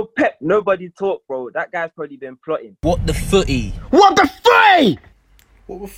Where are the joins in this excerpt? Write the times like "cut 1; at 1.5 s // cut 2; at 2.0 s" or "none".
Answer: cut 1; at 2.8 s